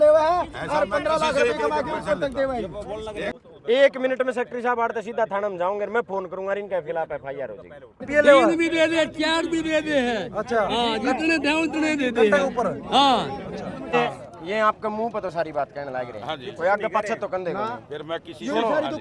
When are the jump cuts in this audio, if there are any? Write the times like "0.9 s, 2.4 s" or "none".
3.3 s, 8.1 s, 13.9 s